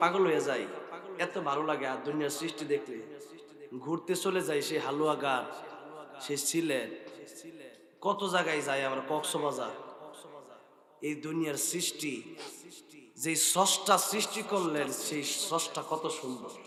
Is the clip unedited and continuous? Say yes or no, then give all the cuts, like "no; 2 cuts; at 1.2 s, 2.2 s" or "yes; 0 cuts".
yes; 0 cuts